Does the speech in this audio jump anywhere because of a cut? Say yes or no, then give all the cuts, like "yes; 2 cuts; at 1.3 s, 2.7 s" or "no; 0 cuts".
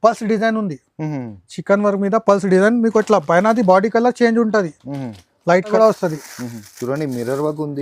yes; 1 cut; at 5.7 s